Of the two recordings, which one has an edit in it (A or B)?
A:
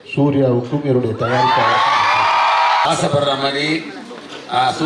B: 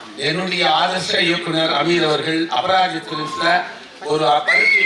A